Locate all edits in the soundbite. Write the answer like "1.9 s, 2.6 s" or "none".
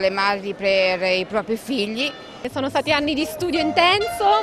2.5 s